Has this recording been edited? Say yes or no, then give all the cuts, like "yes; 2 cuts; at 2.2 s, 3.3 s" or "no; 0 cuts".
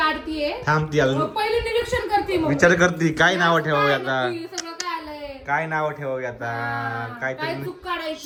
no; 0 cuts